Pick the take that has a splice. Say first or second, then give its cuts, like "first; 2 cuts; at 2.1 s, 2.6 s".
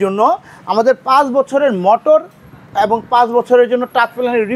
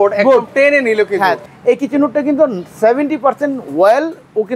second; 1 cut; at 1.4 s